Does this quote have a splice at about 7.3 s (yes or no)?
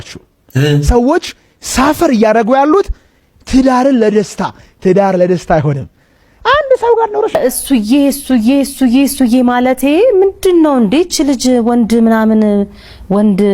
yes